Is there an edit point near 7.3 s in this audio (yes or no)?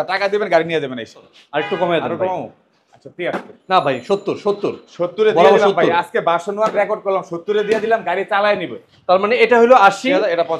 no